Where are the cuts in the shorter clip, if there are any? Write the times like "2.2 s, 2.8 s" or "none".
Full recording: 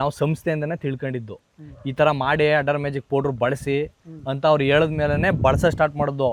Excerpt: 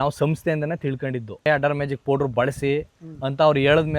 1.5 s